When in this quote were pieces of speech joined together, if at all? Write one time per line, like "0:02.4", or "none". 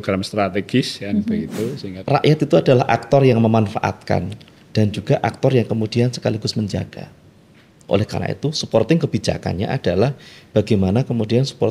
0:01.9